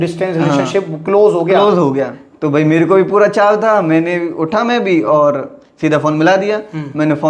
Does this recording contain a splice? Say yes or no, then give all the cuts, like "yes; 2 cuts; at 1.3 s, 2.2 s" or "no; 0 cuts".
yes; 1 cut; at 2.2 s